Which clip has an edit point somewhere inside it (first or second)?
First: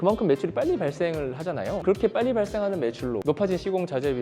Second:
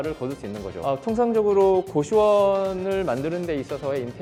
first